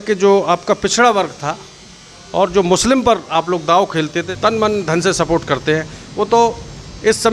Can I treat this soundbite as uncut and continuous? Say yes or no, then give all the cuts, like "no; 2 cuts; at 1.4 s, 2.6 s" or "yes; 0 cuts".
no; 1 cut; at 4.2 s